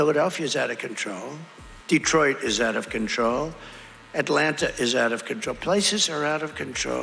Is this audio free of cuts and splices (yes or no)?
yes